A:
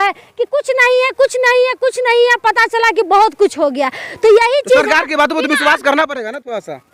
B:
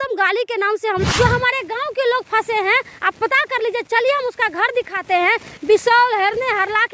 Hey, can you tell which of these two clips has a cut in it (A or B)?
B